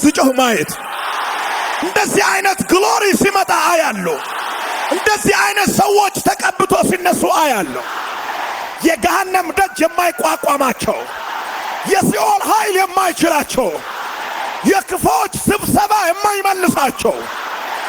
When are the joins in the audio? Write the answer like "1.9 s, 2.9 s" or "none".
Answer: 1.8 s